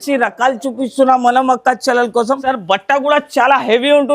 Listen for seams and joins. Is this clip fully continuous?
no; 1 cut; at 2.5 s

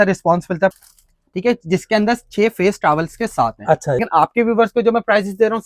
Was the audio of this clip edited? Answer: yes; 2 cuts; at 0.7 s, 4.0 s

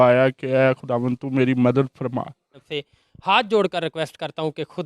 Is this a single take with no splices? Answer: no; 1 cut; at 2.7 s

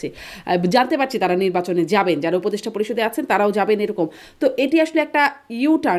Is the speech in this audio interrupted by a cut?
no; 0 cuts

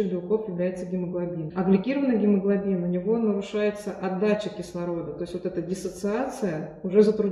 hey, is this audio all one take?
no; 1 cut; at 1.5 s

